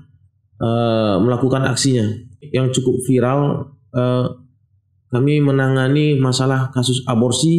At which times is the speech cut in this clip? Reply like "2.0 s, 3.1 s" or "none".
2.4 s